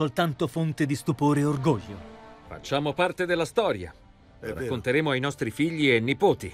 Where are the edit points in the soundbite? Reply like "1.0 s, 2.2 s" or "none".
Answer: 3.7 s